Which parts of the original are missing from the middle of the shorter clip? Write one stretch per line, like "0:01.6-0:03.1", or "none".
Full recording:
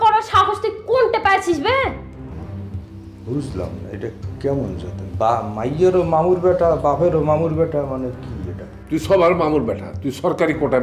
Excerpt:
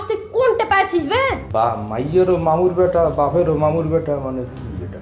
0:02.0-0:05.1